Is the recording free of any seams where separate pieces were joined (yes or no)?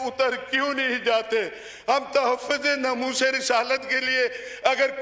yes